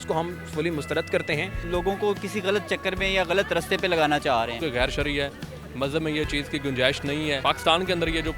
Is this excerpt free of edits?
no; 2 cuts; at 1.6 s, 4.5 s

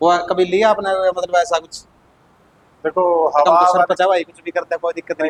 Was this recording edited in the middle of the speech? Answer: no; 0 cuts

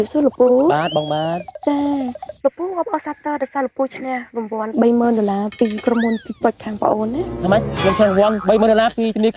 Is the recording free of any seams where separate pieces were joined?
yes; 0 cuts

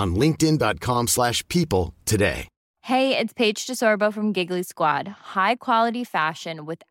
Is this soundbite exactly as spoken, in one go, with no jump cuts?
yes; 0 cuts

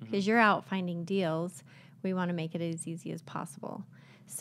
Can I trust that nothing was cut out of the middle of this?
yes; 0 cuts

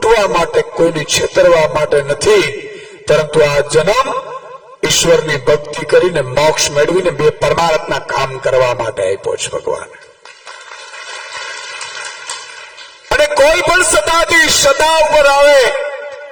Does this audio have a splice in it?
no; 0 cuts

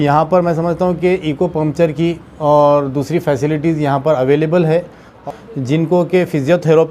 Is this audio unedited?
no; 1 cut; at 5.2 s

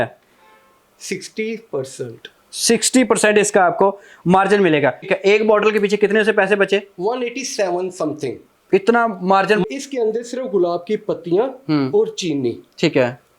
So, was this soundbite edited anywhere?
yes; 2 cuts; at 5.1 s, 9.6 s

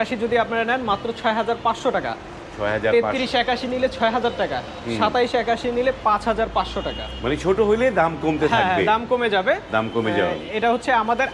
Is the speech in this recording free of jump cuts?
yes; 0 cuts

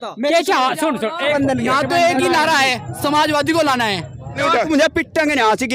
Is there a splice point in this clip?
yes; 2 cuts; at 1.3 s, 4.4 s

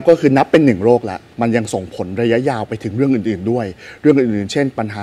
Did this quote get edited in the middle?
yes; 1 cut; at 1.2 s

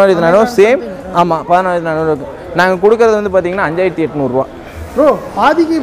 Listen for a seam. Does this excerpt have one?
no; 0 cuts

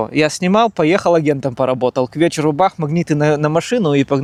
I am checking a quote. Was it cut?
no; 0 cuts

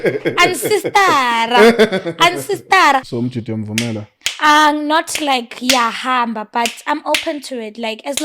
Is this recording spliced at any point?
yes; 1 cut; at 3.1 s

